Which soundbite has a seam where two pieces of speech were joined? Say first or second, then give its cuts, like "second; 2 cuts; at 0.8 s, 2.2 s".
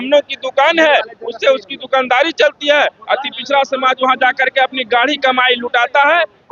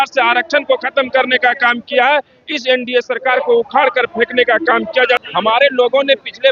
second; 1 cut; at 5.2 s